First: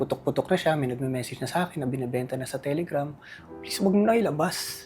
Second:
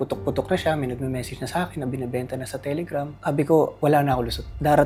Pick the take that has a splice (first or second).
first